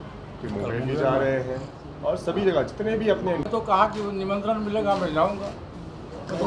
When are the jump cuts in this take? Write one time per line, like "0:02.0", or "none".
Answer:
0:03.4